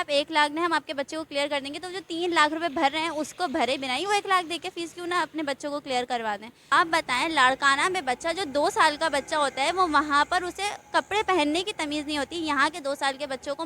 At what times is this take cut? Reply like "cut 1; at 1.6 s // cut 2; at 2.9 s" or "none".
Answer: cut 1; at 6.5 s